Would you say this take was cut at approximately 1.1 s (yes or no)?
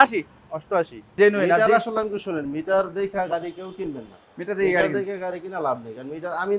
yes